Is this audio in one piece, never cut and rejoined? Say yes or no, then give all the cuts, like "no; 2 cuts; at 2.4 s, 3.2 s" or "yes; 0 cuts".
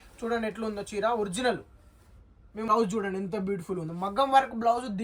no; 1 cut; at 2.7 s